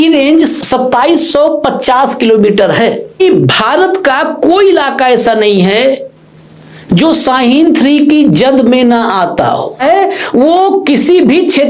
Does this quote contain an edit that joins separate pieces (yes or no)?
yes